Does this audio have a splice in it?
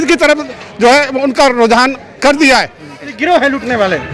yes; 1 cut; at 3.1 s

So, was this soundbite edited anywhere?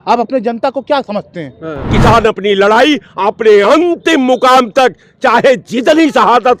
yes; 1 cut; at 1.9 s

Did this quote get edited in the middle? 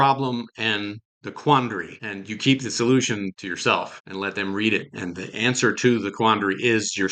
no; 0 cuts

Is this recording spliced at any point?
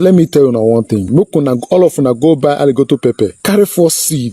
yes; 2 cuts; at 1.1 s, 3.4 s

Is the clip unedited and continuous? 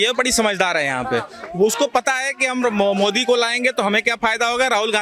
yes; 0 cuts

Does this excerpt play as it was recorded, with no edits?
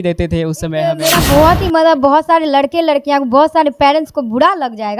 no; 1 cut; at 1.0 s

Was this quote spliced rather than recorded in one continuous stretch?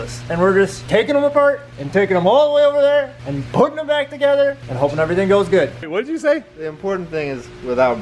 yes; 1 cut; at 5.8 s

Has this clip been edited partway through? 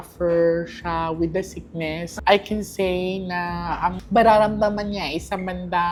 no; 0 cuts

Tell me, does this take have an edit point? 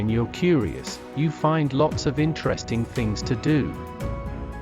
yes; 1 cut; at 3.7 s

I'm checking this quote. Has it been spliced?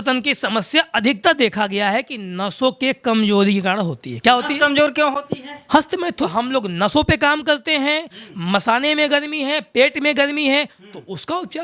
yes; 1 cut; at 6.1 s

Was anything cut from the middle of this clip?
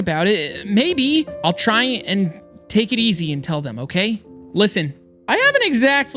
yes; 1 cut; at 5.1 s

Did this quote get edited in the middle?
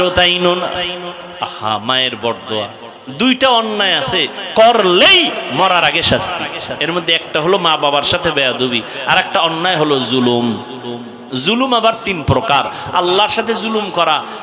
no; 0 cuts

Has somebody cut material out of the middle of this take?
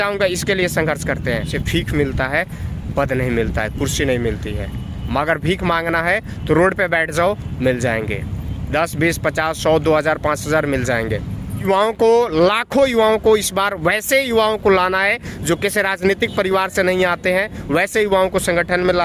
yes; 2 cuts; at 1.5 s, 11.7 s

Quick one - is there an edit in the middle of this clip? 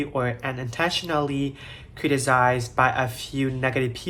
no; 0 cuts

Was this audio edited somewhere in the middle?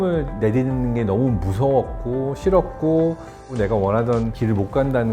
yes; 1 cut; at 3.4 s

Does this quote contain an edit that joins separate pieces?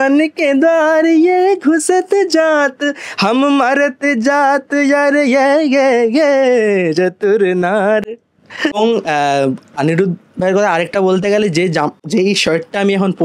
no; 0 cuts

